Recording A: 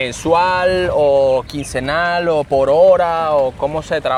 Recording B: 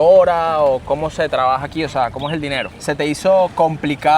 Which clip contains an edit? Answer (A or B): B